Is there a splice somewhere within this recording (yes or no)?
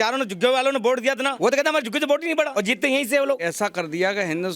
yes